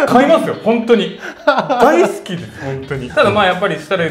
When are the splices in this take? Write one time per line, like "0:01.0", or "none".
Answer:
0:03.1

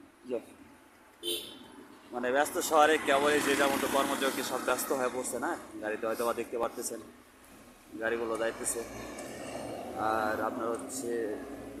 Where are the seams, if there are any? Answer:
none

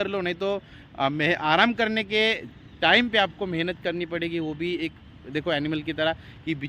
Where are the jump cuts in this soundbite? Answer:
none

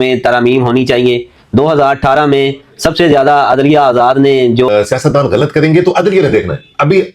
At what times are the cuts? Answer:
0:04.7

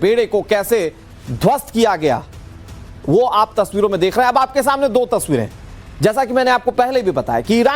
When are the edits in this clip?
0:01.7

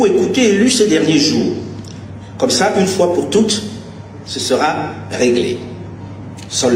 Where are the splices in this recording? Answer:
none

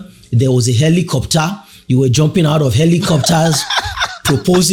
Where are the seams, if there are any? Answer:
none

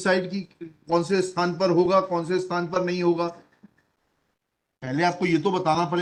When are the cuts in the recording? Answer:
none

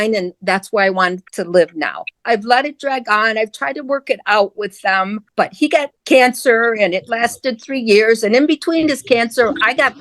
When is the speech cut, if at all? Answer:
0:02.1
0:05.7

